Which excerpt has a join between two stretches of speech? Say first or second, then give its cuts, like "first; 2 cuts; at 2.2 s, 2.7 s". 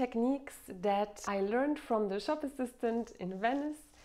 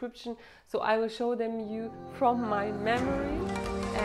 first; 1 cut; at 1.2 s